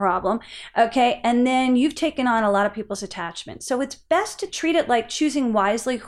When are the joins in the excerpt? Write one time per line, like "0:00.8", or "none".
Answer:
0:04.5